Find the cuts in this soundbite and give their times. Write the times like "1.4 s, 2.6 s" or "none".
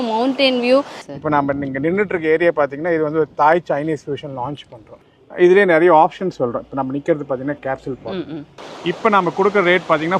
1.0 s, 5.0 s, 8.6 s